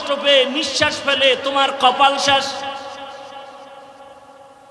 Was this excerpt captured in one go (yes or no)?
yes